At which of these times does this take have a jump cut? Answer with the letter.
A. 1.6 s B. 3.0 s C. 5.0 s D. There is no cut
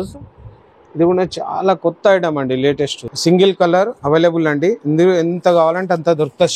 B